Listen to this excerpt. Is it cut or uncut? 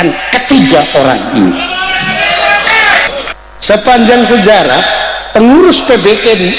cut